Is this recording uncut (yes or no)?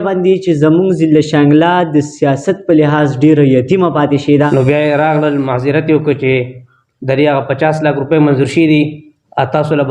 no